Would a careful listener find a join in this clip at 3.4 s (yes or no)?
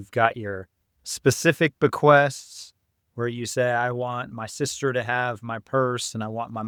no